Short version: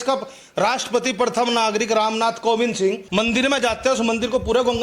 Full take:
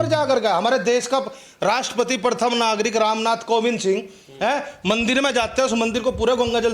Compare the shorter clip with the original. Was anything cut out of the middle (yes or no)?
yes